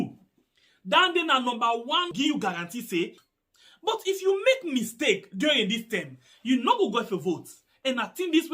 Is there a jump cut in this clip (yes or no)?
yes